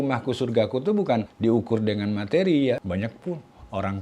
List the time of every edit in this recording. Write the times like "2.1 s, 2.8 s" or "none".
1.3 s, 2.8 s